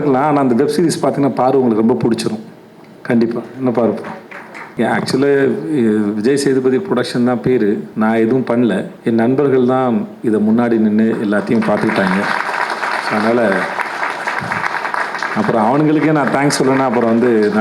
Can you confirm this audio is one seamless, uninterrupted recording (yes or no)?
no